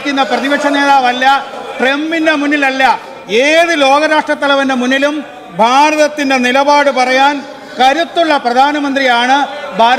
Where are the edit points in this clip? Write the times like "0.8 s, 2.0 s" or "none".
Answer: 1.5 s